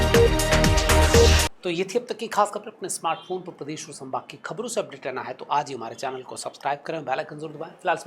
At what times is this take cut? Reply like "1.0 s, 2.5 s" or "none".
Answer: none